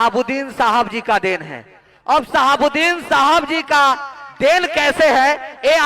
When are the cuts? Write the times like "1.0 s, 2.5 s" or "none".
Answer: none